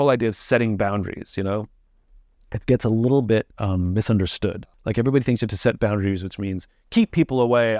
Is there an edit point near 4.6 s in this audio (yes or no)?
yes